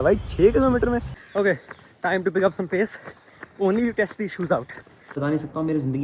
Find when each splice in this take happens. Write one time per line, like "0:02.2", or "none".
0:01.2
0:05.1